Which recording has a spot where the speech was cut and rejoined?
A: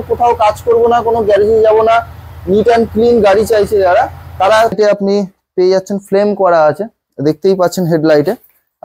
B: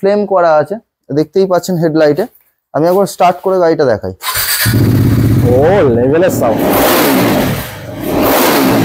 A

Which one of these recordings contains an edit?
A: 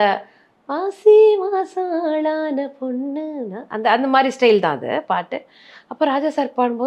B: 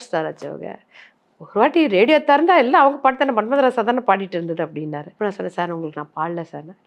B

